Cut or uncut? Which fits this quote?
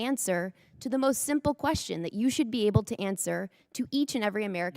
uncut